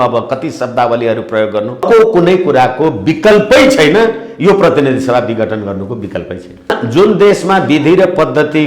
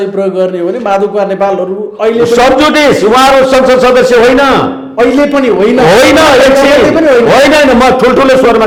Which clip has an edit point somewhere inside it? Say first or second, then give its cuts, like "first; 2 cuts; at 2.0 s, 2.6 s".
first; 2 cuts; at 1.8 s, 6.8 s